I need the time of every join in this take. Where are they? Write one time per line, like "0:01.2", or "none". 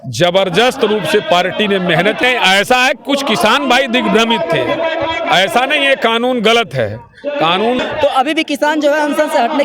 0:02.2
0:07.8